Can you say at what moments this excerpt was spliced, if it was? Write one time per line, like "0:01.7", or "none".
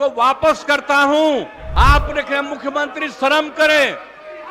0:01.6